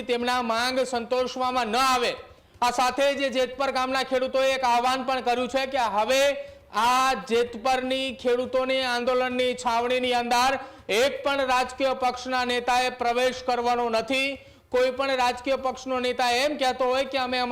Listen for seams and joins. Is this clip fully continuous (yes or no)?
yes